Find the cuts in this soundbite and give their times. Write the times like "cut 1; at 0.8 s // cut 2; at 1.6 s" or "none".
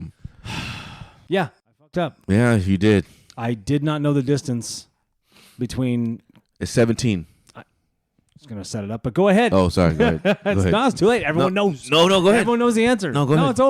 cut 1; at 1.1 s